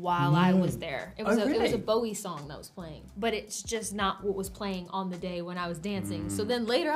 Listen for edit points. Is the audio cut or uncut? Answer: cut